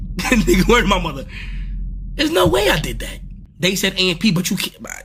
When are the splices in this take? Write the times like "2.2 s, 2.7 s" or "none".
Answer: none